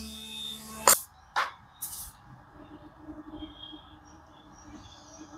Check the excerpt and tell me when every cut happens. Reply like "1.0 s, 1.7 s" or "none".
0.9 s